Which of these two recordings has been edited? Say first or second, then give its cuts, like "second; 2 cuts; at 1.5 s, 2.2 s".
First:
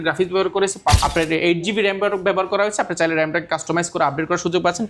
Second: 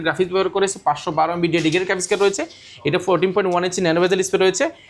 first; 1 cut; at 1.0 s